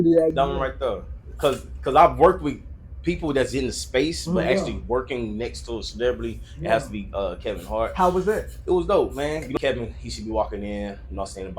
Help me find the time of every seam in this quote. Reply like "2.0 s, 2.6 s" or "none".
9.5 s